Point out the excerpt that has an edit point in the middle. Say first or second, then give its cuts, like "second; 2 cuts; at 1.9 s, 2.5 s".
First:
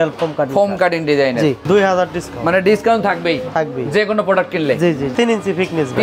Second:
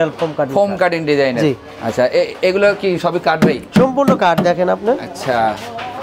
first; 2 cuts; at 1.6 s, 5.1 s